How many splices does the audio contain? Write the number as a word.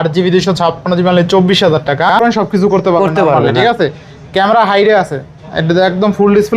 one